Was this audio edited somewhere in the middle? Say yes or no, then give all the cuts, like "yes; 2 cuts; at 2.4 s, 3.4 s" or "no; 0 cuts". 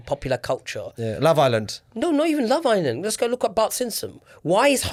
no; 0 cuts